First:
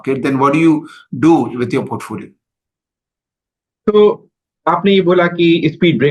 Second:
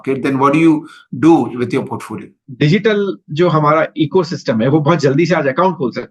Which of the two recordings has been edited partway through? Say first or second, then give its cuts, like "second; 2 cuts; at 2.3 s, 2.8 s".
second; 1 cut; at 2.4 s